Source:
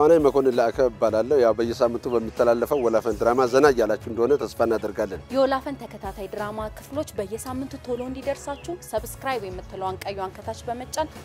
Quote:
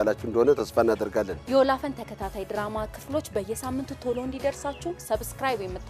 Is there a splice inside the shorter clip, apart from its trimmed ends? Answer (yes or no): no